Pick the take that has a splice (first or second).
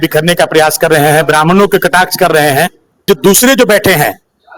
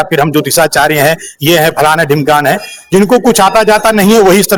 first